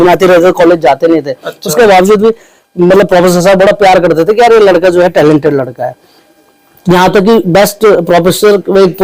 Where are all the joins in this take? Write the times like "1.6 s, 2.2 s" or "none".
none